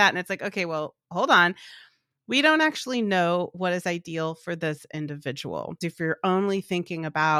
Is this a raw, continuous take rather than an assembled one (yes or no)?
no